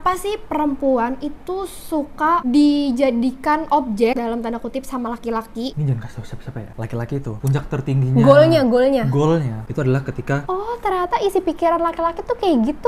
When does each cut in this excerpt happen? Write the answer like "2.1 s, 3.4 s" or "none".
4.1 s, 5.7 s, 10.5 s